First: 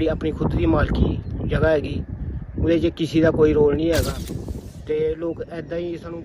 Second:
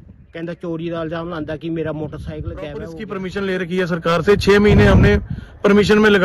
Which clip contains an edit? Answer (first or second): second